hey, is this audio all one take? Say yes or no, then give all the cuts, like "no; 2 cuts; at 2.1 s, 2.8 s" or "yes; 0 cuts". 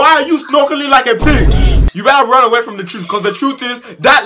no; 1 cut; at 1.9 s